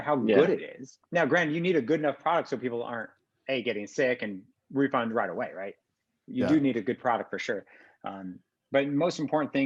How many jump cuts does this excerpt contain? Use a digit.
1